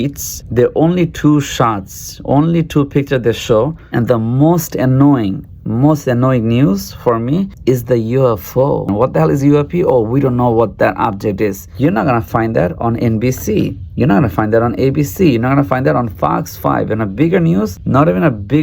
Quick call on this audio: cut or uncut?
cut